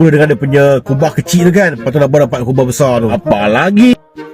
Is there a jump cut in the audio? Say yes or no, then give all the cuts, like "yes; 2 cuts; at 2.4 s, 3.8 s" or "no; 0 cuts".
yes; 1 cut; at 3.2 s